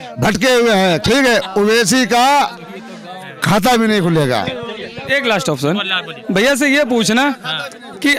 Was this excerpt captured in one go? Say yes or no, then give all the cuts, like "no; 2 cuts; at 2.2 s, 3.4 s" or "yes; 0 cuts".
yes; 0 cuts